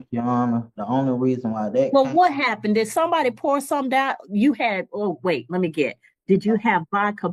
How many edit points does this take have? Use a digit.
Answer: 0